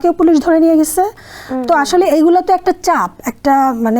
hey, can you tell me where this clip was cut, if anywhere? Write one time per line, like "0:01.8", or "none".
none